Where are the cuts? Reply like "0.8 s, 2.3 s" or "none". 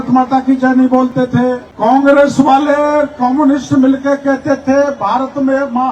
1.7 s